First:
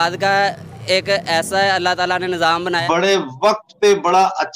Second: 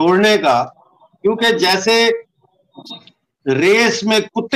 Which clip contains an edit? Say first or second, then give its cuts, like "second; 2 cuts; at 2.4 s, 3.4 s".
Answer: first; 1 cut; at 2.8 s